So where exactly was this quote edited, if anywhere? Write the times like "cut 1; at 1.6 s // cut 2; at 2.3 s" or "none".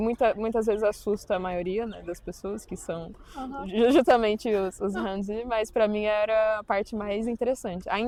none

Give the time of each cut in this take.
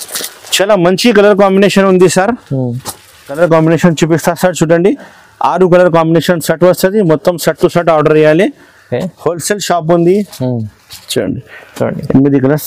cut 1; at 3.4 s

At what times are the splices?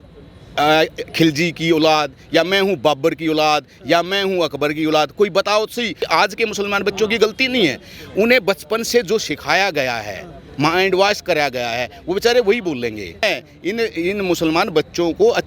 cut 1; at 6.0 s // cut 2; at 13.2 s

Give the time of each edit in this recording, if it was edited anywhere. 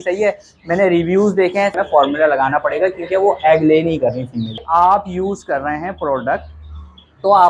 cut 1; at 1.7 s // cut 2; at 4.6 s

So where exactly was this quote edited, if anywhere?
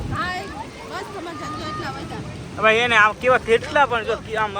none

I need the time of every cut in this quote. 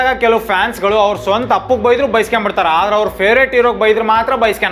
none

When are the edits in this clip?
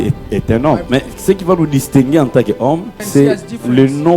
cut 1; at 0.8 s // cut 2; at 3.0 s

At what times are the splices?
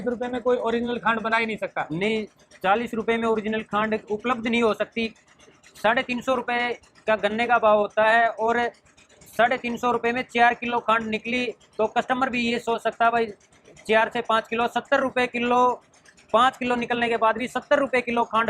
none

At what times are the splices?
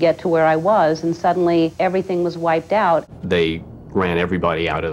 cut 1; at 1.7 s // cut 2; at 3.1 s

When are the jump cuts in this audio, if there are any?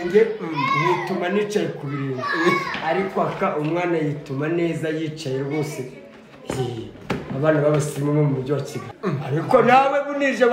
cut 1; at 8.8 s

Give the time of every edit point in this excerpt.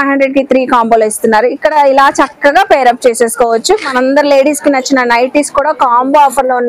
none

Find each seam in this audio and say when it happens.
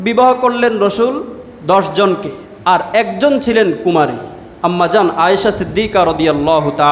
none

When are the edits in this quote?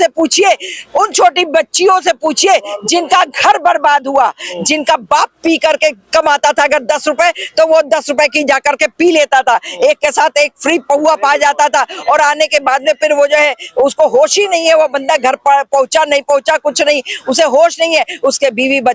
none

